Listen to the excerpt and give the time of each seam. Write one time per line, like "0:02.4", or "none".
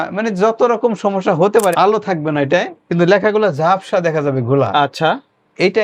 0:01.7